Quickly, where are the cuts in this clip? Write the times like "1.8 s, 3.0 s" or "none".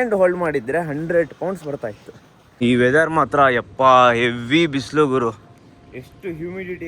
2.4 s